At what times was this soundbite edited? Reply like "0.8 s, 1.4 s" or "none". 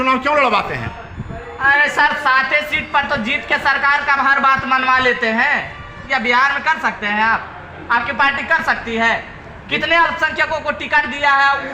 none

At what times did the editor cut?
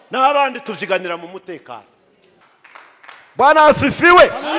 2.5 s

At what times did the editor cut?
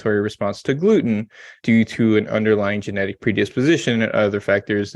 1.5 s

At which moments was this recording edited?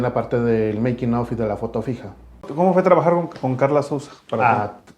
2.5 s

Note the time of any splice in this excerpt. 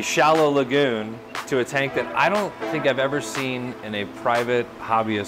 none

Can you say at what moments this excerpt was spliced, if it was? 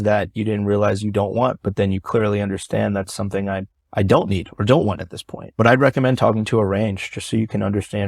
none

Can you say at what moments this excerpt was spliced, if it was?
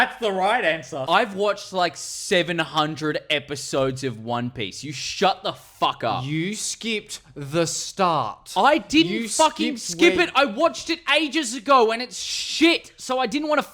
1.0 s

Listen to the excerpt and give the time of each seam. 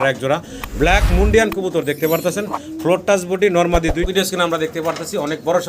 4.0 s

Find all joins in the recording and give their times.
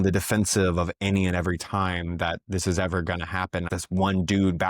3.7 s

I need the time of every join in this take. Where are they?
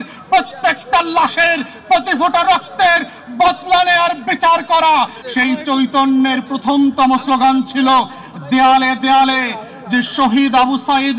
5.2 s

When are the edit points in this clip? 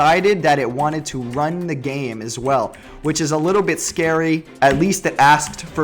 4.5 s

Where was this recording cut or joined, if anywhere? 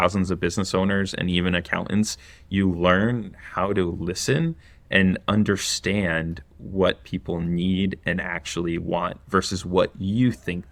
none

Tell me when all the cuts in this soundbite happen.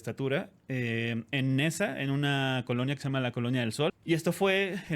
3.9 s

